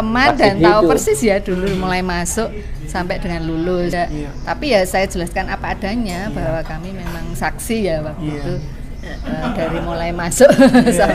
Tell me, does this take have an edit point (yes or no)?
yes